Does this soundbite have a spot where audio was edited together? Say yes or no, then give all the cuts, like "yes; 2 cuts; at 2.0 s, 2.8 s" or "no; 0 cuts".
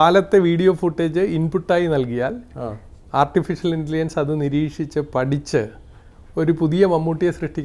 no; 0 cuts